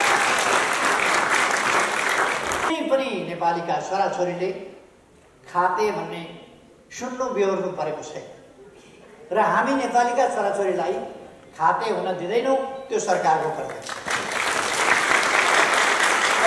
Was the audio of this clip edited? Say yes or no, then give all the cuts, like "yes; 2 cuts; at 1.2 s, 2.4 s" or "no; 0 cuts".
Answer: yes; 1 cut; at 2.7 s